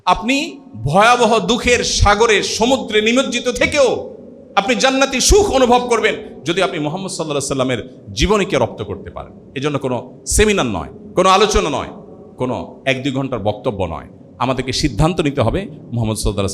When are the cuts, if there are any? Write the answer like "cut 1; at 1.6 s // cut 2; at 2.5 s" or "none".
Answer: none